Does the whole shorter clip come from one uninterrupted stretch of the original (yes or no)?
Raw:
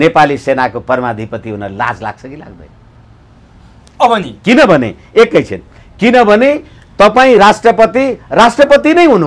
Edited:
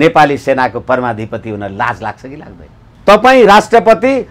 no